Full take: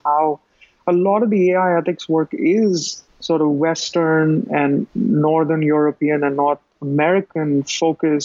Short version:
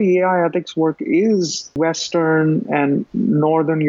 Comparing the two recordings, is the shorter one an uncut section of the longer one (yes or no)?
no